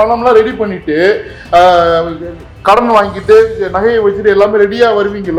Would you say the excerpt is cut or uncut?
uncut